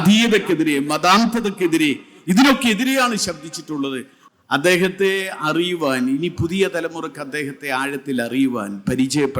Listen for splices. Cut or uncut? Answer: cut